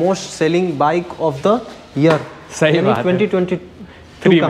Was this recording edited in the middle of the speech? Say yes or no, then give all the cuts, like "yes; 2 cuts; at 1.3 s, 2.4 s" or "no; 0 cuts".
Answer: no; 0 cuts